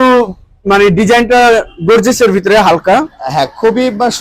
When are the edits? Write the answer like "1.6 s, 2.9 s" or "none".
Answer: none